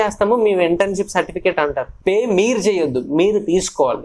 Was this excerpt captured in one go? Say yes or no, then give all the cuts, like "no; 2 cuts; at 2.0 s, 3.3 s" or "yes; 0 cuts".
no; 1 cut; at 1.9 s